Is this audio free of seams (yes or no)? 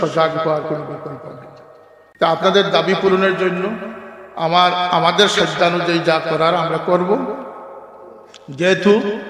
yes